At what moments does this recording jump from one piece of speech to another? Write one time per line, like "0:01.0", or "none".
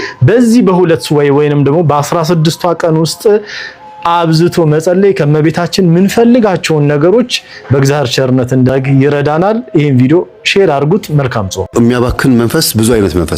none